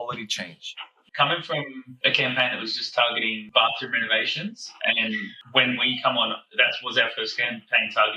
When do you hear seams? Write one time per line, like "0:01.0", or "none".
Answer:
0:01.0
0:01.9
0:03.4